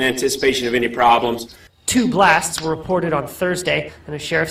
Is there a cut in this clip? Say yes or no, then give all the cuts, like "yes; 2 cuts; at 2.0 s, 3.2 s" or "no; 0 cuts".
no; 0 cuts